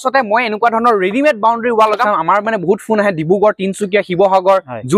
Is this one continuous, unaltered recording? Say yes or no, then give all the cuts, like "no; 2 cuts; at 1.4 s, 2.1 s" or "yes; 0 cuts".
no; 1 cut; at 2.0 s